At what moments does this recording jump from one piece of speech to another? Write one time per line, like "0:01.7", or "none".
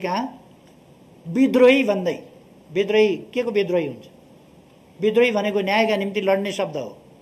none